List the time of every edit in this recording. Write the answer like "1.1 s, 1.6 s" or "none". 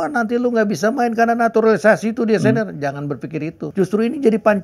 3.6 s